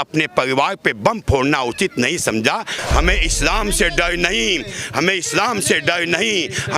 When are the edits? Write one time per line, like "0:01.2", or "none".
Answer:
0:02.8